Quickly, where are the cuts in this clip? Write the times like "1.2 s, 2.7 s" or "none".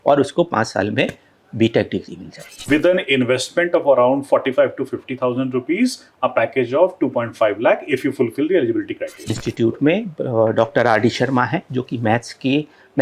2.5 s, 9.3 s